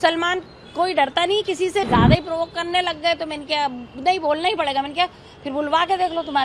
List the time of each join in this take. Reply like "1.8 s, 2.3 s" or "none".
1.9 s